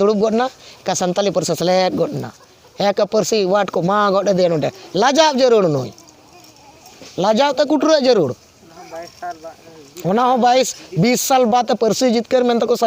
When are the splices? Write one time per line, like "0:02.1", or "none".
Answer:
none

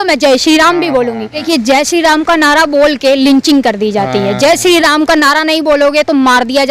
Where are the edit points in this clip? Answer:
0:01.4

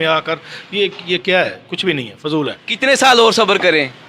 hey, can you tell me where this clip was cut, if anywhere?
0:02.6

